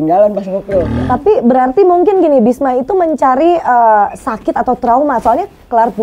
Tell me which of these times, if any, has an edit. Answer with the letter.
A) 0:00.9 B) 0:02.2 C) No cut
A